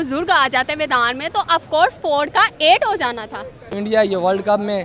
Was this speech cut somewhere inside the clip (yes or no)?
yes